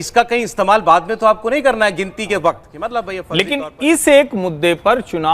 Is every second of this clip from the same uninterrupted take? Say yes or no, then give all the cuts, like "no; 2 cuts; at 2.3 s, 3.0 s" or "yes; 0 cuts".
no; 1 cut; at 3.2 s